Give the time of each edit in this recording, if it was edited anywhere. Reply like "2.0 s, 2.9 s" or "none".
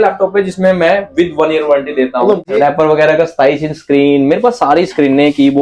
2.4 s